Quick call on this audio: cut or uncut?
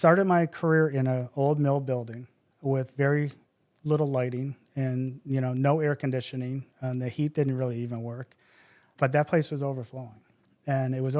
cut